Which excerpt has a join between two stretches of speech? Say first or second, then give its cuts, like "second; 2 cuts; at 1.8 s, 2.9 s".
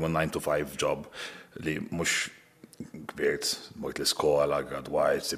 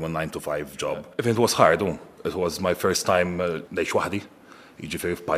second; 2 cuts; at 1.1 s, 3.7 s